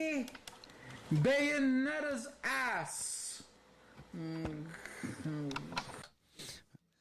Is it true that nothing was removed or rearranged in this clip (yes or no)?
yes